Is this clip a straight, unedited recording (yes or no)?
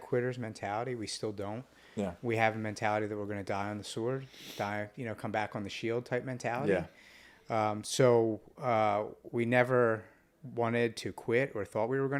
yes